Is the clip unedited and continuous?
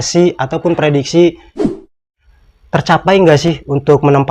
no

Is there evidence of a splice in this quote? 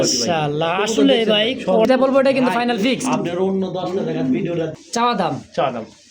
yes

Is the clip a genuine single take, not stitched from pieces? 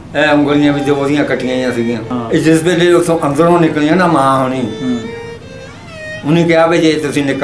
no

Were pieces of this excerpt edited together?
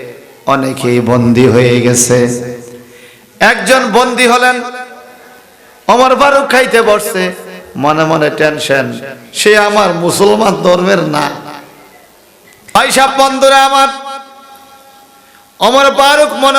yes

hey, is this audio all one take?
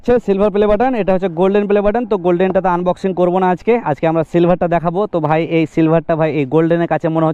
yes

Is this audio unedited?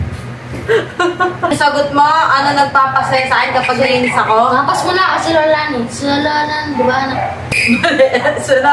no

